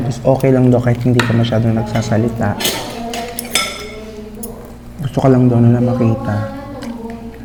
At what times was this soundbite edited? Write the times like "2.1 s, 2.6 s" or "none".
none